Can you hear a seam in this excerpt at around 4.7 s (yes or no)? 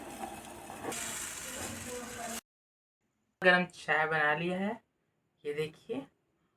no